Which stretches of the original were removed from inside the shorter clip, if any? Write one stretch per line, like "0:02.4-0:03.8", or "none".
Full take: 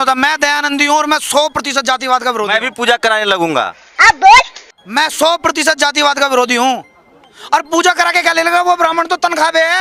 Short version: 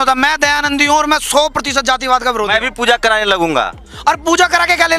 0:03.8-0:07.3